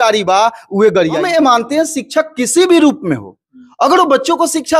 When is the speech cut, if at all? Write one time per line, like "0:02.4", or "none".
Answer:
0:01.3